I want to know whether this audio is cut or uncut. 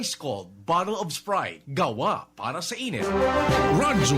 cut